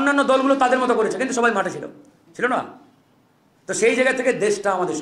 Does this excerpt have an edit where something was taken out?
no; 0 cuts

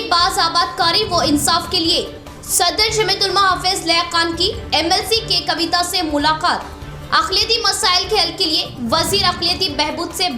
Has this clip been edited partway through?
no; 0 cuts

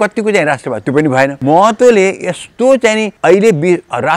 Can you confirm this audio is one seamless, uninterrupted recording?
no; 2 cuts; at 1.4 s, 3.1 s

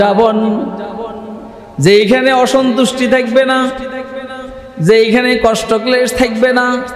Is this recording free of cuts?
yes; 0 cuts

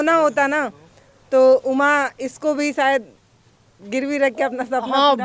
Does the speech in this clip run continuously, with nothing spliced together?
yes; 0 cuts

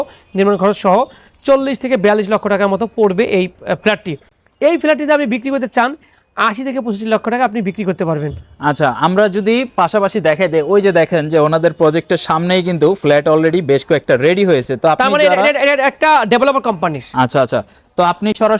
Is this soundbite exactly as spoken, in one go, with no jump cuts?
yes; 0 cuts

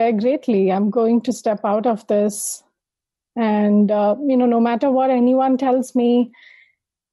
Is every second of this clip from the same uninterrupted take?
yes; 0 cuts

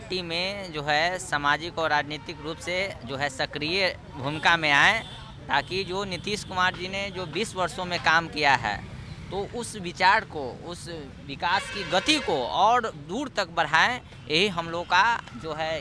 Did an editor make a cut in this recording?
no; 0 cuts

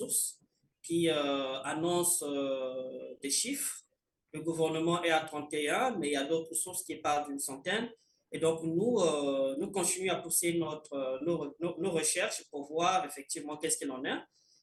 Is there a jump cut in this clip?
no; 0 cuts

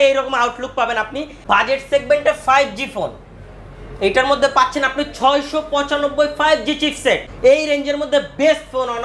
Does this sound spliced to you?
yes; 2 cuts; at 1.3 s, 7.3 s

